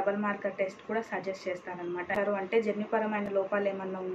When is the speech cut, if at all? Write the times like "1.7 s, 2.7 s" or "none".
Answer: 2.1 s